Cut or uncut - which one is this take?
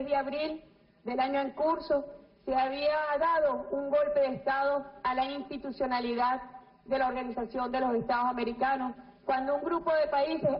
cut